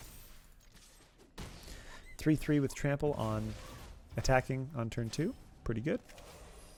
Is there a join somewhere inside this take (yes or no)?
no